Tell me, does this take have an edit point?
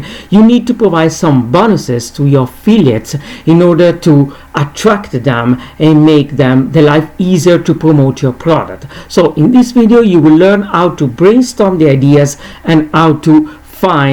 no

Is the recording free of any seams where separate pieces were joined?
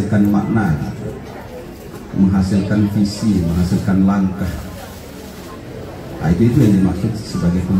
yes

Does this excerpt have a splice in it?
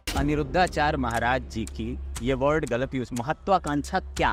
no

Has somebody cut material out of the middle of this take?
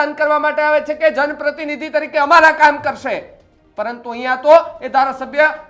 no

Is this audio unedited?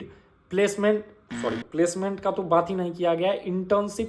yes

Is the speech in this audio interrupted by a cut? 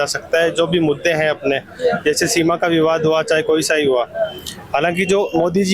no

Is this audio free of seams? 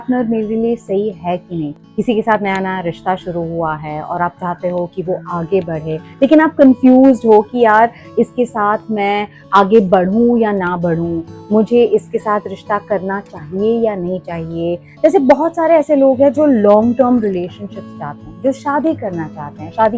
no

